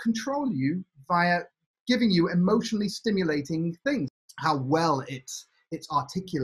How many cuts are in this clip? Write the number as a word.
one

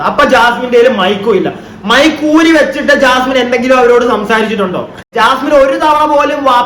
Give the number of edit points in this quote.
one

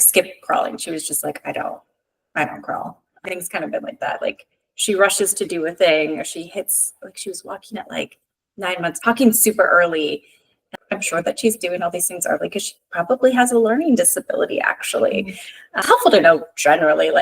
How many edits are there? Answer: three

